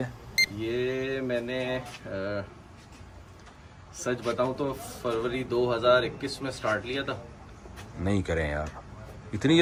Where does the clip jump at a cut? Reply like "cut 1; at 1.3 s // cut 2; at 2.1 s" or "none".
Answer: none